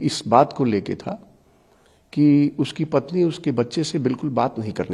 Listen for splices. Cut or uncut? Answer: uncut